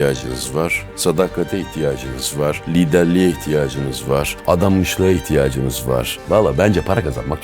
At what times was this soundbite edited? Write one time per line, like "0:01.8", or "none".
0:02.6
0:04.3
0:06.2